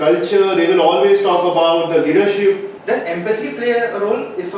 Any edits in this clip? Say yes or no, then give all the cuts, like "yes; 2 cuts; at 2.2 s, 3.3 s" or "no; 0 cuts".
yes; 1 cut; at 2.7 s